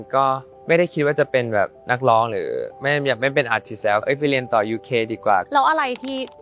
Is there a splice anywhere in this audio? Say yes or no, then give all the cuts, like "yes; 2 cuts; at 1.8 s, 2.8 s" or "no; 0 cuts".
yes; 2 cuts; at 4.0 s, 5.5 s